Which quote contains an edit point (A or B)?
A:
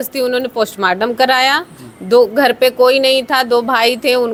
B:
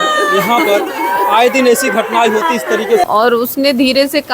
B